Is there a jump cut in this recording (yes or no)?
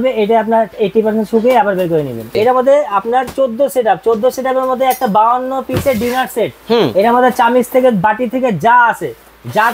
yes